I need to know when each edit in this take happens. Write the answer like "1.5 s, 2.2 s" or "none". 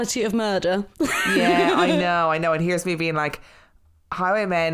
none